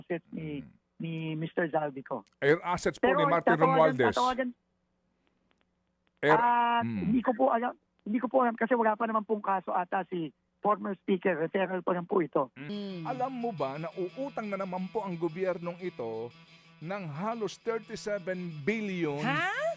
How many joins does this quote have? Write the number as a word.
one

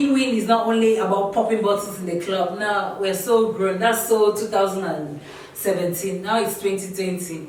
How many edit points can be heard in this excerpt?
zero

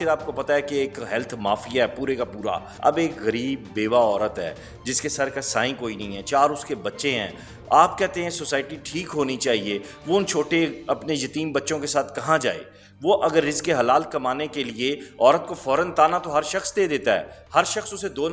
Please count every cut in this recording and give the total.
one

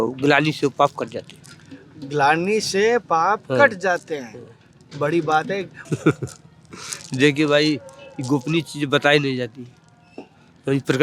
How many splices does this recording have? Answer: one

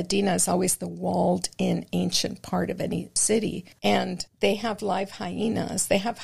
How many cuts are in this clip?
one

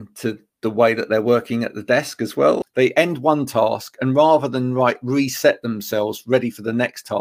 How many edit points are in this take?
one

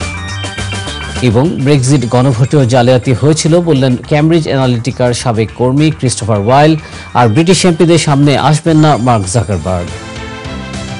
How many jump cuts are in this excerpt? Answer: one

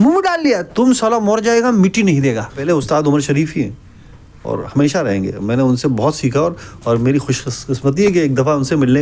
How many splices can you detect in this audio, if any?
one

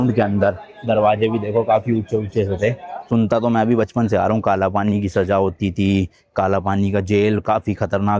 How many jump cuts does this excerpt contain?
one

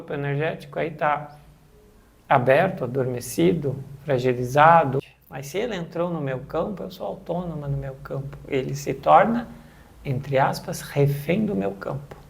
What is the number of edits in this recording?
one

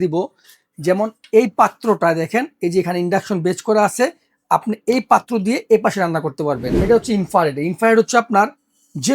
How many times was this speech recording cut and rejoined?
one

